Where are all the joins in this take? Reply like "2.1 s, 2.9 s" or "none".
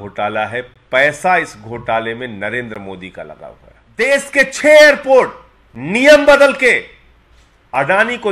4.0 s